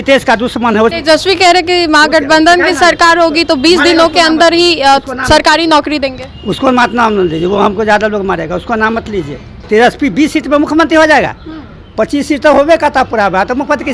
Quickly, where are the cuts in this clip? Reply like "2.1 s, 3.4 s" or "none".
none